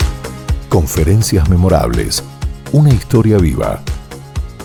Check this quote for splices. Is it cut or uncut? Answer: uncut